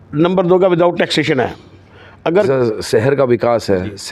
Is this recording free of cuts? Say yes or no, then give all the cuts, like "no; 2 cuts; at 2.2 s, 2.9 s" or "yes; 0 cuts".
no; 1 cut; at 2.5 s